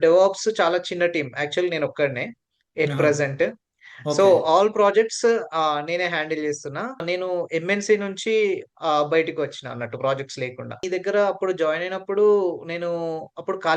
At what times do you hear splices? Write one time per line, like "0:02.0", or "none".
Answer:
0:07.0
0:10.8